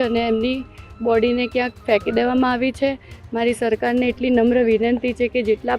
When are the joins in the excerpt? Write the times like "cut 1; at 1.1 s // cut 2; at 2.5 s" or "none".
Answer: none